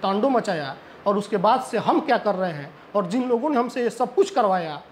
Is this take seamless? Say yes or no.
yes